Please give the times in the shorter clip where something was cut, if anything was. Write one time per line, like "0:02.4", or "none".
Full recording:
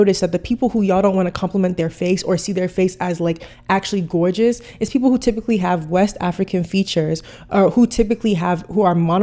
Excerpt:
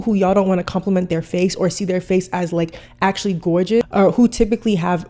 0:03.9